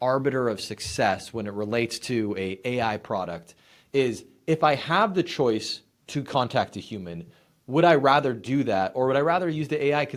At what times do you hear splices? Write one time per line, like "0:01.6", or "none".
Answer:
none